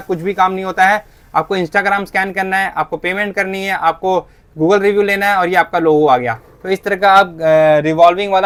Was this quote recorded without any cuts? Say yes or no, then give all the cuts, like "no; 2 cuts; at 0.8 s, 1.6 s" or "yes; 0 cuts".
yes; 0 cuts